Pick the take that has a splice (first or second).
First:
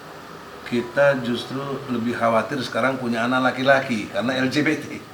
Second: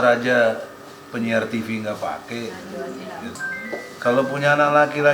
second